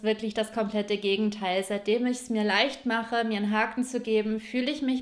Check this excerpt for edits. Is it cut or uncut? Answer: uncut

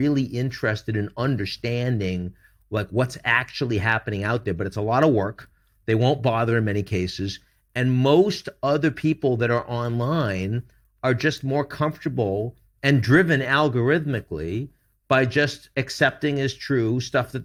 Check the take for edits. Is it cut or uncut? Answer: uncut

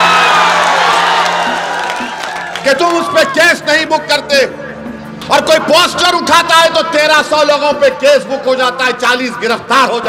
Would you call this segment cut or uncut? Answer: uncut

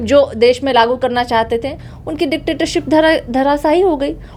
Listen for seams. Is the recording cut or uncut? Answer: uncut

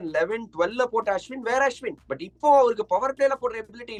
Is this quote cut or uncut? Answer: uncut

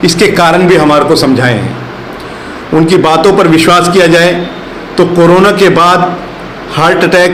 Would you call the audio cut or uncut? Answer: uncut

